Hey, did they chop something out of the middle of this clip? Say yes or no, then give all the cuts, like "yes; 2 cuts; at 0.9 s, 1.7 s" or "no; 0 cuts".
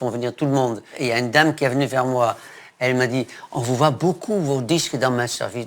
yes; 2 cuts; at 1.0 s, 2.6 s